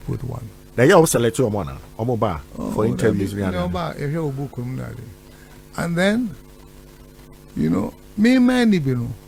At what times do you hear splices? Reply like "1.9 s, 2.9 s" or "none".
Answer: none

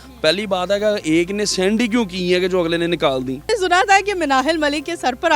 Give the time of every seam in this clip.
3.5 s

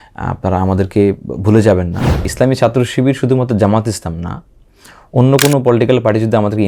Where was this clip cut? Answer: 2.3 s

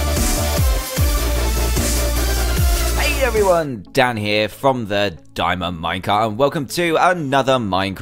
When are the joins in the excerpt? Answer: 2.9 s

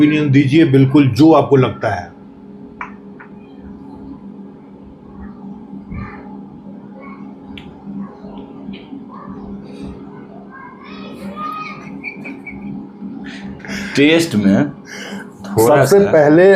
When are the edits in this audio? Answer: none

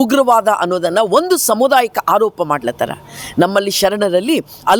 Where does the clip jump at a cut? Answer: none

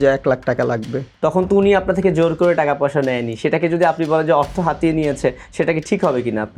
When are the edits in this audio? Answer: 1.1 s

